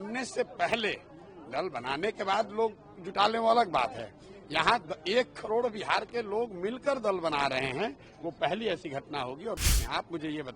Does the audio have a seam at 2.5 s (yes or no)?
no